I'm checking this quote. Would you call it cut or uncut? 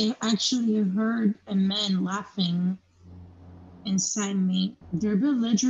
cut